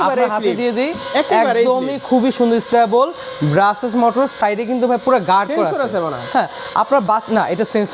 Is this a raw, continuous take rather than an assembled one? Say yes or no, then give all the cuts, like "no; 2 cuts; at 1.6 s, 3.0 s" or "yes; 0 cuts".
yes; 0 cuts